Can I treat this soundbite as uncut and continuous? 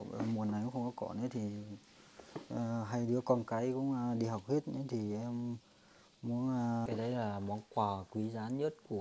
no; 1 cut; at 6.9 s

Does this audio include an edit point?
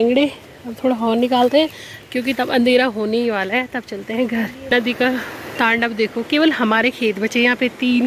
yes; 1 cut; at 4.7 s

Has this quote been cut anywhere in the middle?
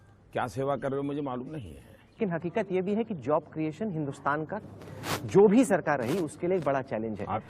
no; 0 cuts

